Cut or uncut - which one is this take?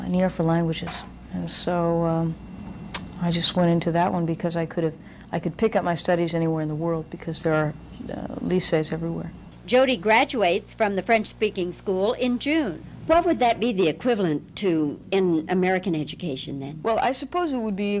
cut